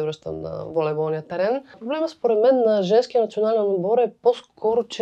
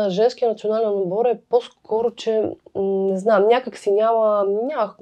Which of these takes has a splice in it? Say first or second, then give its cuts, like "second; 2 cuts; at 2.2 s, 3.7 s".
first; 1 cut; at 1.8 s